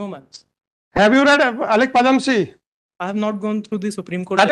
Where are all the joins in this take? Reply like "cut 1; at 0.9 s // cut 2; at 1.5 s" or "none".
none